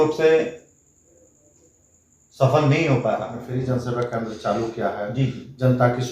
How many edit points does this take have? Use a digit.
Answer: 1